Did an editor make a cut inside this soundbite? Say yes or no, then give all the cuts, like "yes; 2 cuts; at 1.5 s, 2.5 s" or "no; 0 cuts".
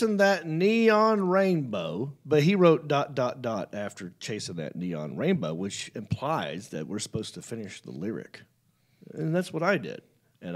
yes; 1 cut; at 2.1 s